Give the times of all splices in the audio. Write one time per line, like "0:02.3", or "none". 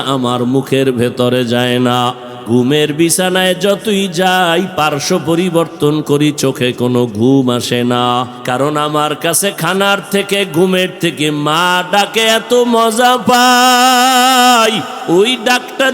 0:02.3
0:08.4
0:14.9